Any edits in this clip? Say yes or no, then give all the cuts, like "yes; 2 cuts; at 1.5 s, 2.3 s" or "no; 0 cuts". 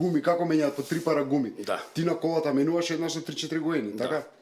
no; 0 cuts